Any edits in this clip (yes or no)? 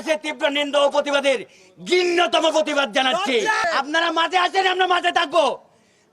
yes